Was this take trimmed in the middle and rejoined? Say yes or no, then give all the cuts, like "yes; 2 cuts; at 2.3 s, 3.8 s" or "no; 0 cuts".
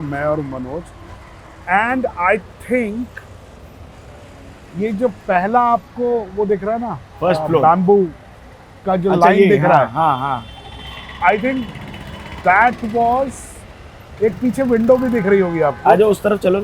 no; 0 cuts